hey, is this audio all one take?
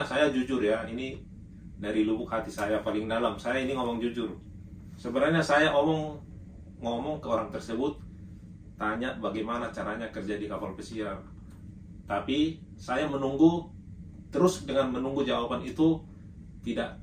yes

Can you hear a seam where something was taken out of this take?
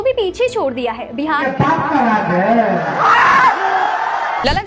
yes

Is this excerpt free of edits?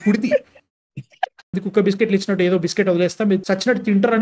no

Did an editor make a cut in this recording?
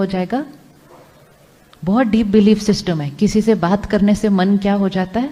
no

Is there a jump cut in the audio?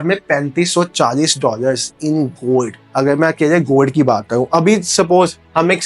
no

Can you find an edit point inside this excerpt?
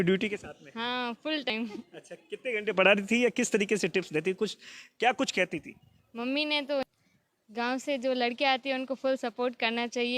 yes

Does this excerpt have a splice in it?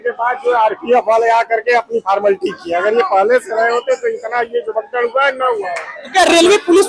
no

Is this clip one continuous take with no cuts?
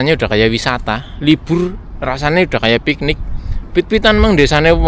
yes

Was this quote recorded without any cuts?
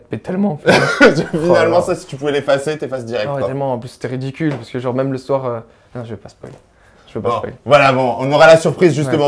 yes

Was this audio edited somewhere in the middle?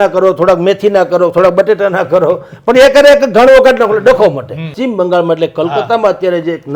yes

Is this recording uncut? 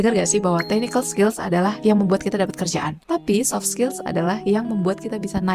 yes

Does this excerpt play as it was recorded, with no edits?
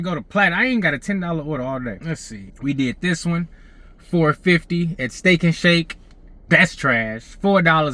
yes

